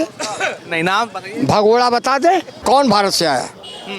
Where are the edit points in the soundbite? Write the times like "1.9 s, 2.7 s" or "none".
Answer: 2.5 s